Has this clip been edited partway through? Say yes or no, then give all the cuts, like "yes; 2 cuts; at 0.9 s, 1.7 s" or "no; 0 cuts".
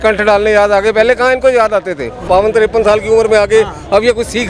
yes; 1 cut; at 2.2 s